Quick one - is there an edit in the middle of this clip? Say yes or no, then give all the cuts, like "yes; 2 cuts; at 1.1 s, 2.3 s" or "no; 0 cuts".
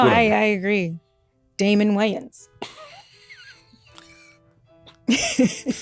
no; 0 cuts